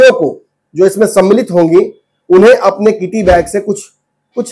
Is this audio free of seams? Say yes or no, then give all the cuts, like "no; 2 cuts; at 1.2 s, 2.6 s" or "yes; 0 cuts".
yes; 0 cuts